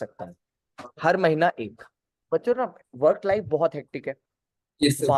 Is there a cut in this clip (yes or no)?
yes